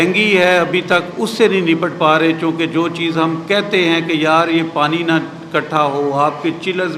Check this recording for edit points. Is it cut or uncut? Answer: uncut